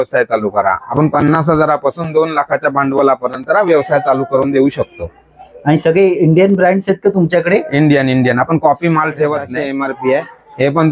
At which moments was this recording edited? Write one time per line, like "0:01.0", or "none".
0:00.8
0:09.6